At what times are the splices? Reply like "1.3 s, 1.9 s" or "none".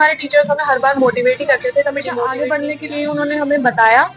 2.3 s